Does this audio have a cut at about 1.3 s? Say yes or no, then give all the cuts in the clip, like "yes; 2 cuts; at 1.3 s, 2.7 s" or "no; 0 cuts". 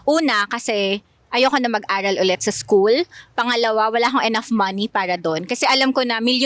no; 0 cuts